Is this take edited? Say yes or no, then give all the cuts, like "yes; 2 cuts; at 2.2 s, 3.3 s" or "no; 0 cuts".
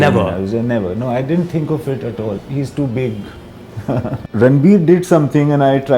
yes; 2 cuts; at 2.4 s, 4.2 s